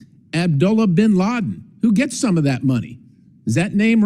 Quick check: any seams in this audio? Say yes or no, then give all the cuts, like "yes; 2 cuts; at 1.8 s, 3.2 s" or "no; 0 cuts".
no; 0 cuts